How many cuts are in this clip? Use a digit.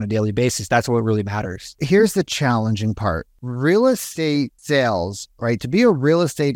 3